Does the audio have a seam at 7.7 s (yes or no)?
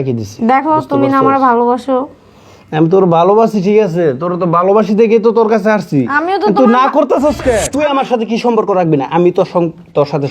yes